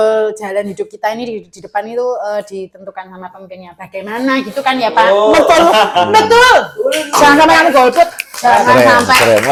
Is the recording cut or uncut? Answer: uncut